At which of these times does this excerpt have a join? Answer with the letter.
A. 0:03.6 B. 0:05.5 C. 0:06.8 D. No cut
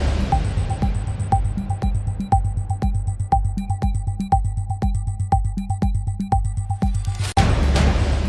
D